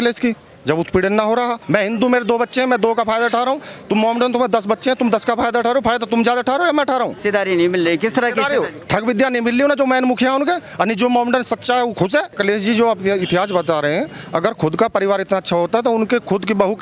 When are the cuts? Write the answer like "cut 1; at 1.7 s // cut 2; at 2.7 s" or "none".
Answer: cut 1; at 1.6 s // cut 2; at 7.1 s // cut 3; at 12.4 s